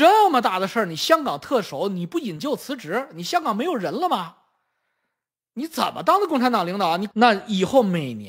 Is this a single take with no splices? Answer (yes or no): no